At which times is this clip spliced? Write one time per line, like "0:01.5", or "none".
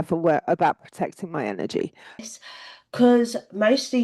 0:02.3